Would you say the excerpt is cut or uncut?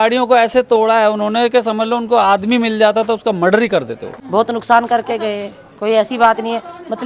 cut